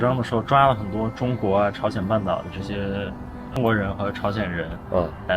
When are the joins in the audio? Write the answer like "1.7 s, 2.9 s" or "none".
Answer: 3.6 s